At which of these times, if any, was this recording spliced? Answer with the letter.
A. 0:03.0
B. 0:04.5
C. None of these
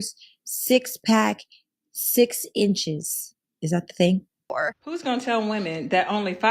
B